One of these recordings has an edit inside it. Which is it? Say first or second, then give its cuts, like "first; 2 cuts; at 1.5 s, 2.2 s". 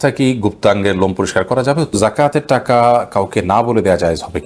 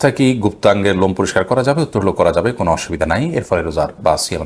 first; 1 cut; at 1.9 s